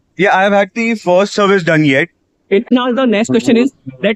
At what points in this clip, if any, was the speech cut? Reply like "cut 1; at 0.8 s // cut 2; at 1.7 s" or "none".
cut 1; at 2.7 s